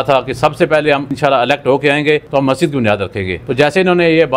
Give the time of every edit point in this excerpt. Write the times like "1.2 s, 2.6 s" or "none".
1.1 s, 2.2 s, 3.4 s